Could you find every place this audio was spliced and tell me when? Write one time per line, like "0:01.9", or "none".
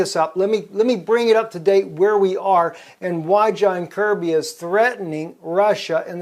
0:02.7